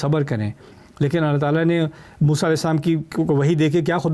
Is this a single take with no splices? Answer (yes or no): yes